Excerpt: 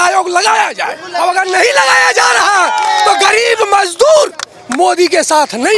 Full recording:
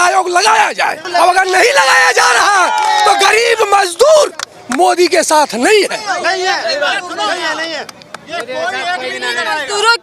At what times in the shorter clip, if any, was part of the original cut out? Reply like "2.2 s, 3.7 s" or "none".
none